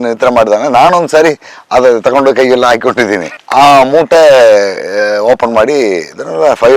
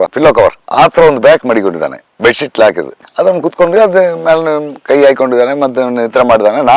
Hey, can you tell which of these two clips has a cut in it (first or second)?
first